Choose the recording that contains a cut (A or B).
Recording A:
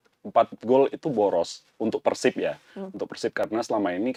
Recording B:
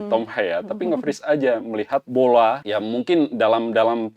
B